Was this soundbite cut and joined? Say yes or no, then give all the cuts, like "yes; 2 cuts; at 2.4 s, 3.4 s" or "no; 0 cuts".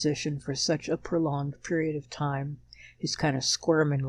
no; 0 cuts